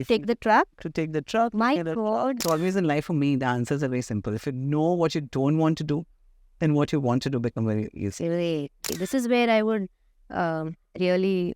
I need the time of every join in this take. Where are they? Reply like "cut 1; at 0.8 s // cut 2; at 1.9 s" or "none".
cut 1; at 2.4 s // cut 2; at 8.9 s